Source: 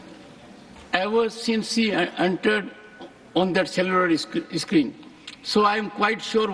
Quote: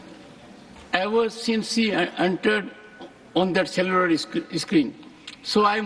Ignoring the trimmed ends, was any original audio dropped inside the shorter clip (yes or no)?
no